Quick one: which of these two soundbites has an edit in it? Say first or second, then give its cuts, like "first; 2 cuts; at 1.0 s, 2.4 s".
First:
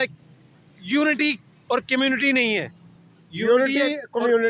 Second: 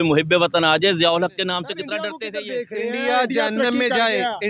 second; 1 cut; at 2.2 s